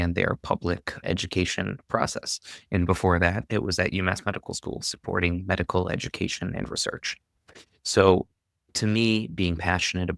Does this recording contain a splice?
yes; 1 cut; at 1.0 s

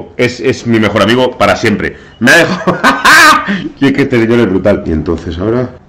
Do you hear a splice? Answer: yes; 1 cut; at 4.9 s

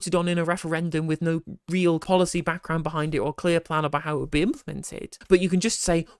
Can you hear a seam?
no; 0 cuts

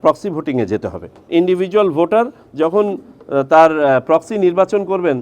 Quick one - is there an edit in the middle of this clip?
yes; 1 cut; at 1.3 s

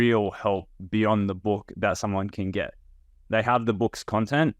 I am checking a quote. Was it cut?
no; 0 cuts

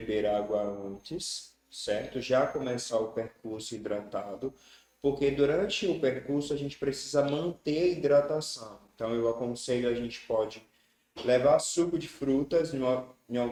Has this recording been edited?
no; 0 cuts

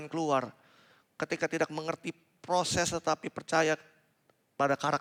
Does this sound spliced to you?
no; 0 cuts

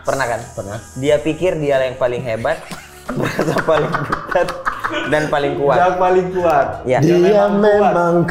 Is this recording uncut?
yes; 0 cuts

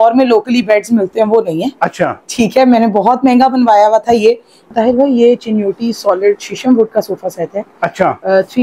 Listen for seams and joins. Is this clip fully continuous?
no; 1 cut; at 4.7 s

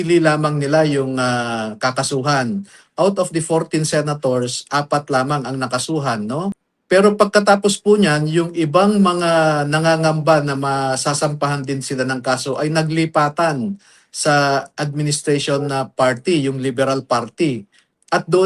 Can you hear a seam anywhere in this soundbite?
yes; 1 cut; at 6.7 s

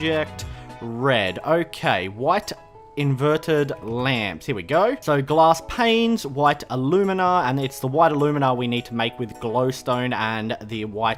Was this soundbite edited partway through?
no; 0 cuts

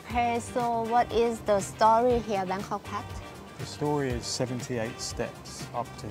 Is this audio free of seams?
yes; 0 cuts

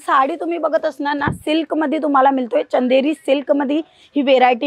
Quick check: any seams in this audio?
no; 0 cuts

